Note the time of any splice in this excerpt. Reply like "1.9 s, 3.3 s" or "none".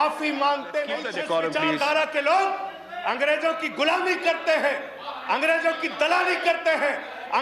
1.1 s